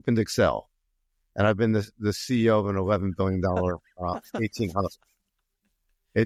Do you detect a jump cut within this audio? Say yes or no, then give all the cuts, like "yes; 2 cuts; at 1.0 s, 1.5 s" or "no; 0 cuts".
no; 0 cuts